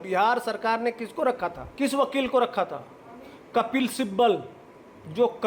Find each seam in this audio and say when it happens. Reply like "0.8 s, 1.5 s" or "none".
1.6 s